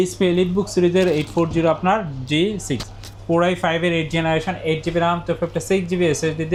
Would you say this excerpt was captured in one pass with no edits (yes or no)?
yes